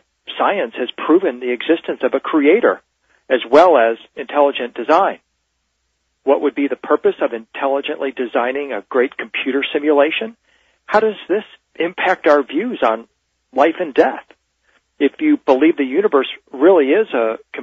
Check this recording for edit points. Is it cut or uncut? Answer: cut